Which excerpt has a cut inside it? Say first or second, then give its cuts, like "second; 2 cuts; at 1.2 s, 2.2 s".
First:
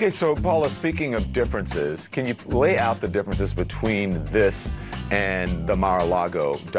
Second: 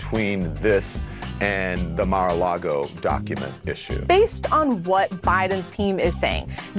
second; 1 cut; at 4.0 s